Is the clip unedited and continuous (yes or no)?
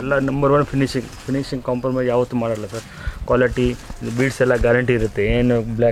yes